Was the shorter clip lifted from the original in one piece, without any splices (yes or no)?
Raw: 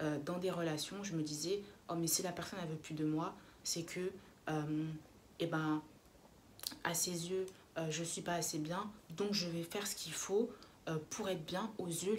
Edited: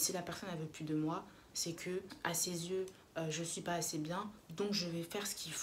no